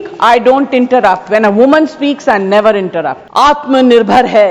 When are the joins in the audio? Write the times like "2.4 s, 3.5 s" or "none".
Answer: 3.2 s